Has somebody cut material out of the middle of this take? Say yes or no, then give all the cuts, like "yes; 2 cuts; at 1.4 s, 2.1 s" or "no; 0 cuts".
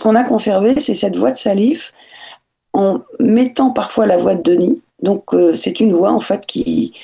no; 0 cuts